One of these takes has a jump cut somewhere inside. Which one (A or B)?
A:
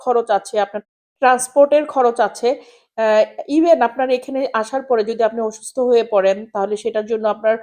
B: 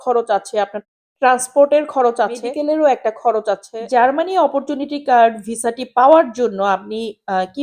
B